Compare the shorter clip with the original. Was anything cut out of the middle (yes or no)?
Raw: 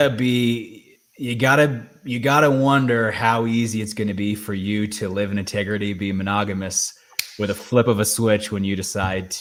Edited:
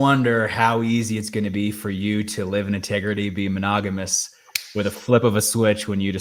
no